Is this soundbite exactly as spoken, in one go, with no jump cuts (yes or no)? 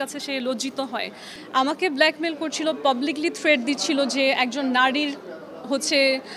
no